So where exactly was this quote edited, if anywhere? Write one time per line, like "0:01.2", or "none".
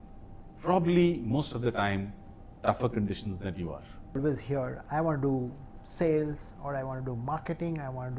0:04.2